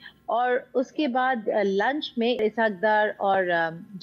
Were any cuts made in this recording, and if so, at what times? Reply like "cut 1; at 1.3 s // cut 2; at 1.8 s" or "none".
cut 1; at 2.4 s